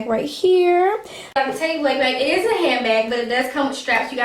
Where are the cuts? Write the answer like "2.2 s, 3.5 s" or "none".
1.3 s